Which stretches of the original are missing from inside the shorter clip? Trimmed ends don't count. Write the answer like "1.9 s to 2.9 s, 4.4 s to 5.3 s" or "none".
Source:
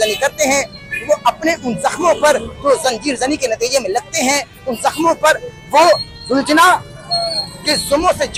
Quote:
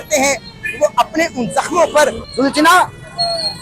2.5 s to 6.1 s